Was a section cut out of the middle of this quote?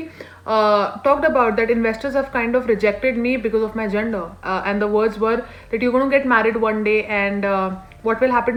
no; 0 cuts

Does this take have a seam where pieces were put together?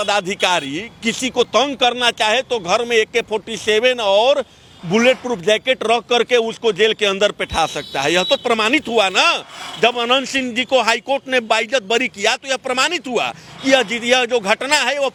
no; 0 cuts

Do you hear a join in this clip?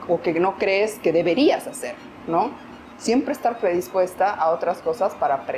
no; 0 cuts

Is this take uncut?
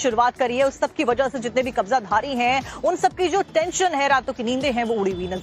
no; 1 cut; at 1.0 s

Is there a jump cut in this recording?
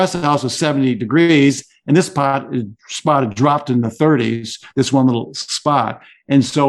no; 0 cuts

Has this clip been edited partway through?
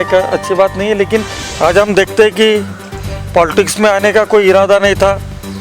yes; 1 cut; at 1.4 s

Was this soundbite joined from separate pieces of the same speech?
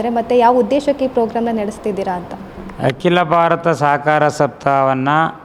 no; 0 cuts

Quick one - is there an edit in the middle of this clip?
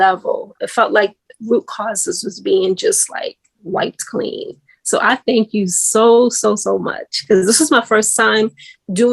no; 0 cuts

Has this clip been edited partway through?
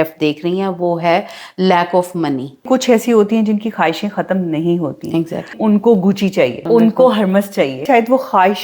yes; 4 cuts; at 2.7 s, 5.5 s, 6.6 s, 7.8 s

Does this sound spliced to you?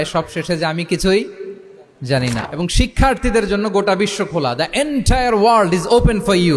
yes; 1 cut; at 2.4 s

